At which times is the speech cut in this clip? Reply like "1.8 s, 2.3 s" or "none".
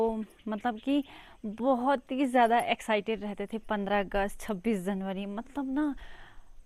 none